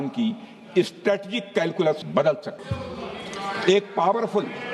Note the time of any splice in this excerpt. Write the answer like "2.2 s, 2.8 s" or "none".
none